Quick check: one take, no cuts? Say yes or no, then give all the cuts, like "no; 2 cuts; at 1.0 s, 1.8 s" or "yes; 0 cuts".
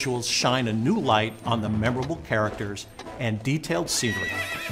no; 1 cut; at 3.8 s